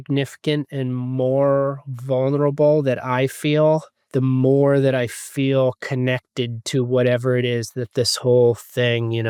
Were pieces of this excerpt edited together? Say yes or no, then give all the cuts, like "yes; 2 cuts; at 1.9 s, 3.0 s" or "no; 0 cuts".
no; 0 cuts